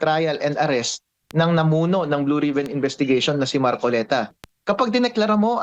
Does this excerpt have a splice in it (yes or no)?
yes